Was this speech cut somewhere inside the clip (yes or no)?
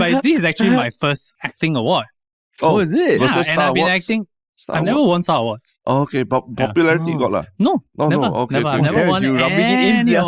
yes